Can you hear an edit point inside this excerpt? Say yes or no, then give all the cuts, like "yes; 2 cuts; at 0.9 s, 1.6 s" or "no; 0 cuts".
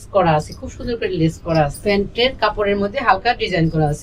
yes; 1 cut; at 1.8 s